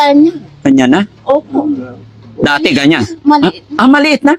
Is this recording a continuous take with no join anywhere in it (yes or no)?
yes